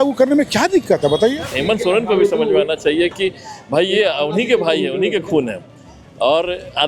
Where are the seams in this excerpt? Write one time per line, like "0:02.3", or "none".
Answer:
0:01.6